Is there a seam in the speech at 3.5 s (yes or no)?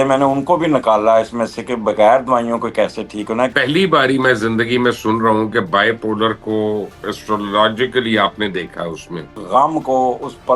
yes